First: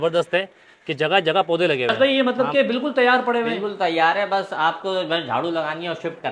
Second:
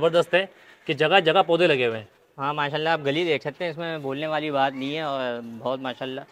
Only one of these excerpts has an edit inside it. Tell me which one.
first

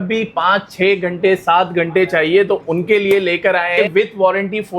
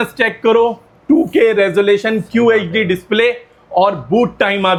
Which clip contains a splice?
first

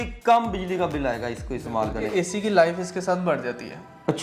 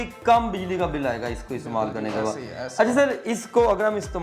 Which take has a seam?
first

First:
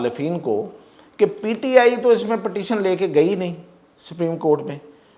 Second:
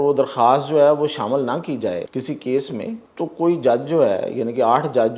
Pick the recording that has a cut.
second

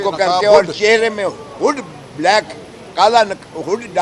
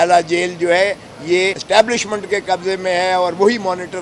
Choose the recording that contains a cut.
second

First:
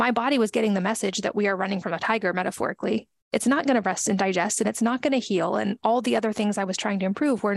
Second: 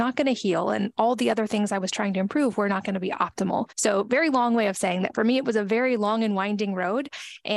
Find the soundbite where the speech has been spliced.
second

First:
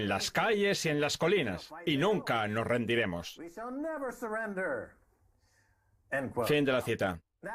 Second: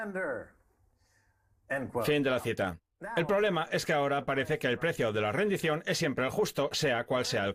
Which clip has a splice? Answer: first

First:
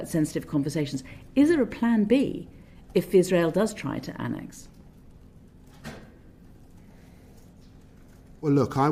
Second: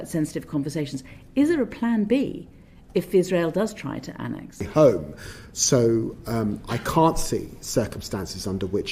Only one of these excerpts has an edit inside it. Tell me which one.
second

